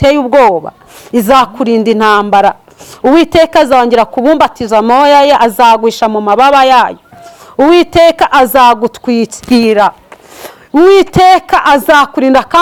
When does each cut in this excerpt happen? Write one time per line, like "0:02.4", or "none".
none